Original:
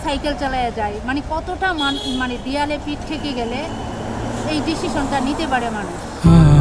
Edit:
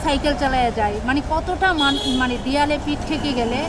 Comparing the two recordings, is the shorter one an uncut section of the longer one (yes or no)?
yes